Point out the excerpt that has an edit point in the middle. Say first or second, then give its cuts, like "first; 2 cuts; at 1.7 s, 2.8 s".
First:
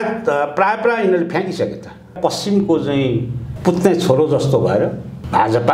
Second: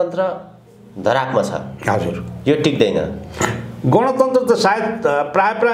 first; 1 cut; at 2.1 s